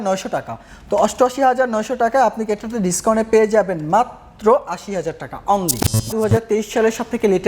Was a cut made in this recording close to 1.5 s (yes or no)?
no